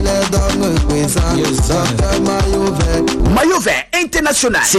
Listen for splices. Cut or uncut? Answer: uncut